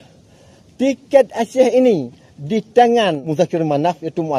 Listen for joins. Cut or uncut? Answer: cut